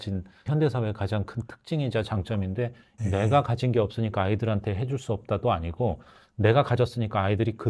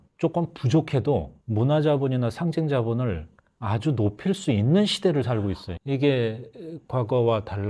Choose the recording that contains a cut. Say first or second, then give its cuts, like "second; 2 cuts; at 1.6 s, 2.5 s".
first; 1 cut; at 2.9 s